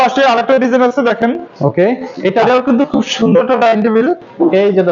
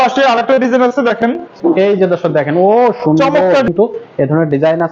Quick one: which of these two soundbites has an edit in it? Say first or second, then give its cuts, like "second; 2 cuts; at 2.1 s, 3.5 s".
second; 2 cuts; at 1.5 s, 3.7 s